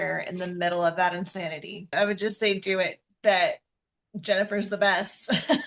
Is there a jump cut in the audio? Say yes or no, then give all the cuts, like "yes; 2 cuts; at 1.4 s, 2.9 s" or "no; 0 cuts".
yes; 1 cut; at 1.9 s